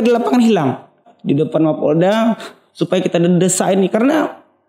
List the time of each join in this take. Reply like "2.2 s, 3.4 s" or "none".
1.0 s